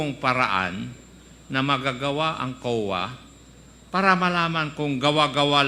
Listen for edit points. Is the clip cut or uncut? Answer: uncut